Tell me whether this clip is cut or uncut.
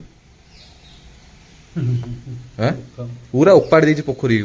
uncut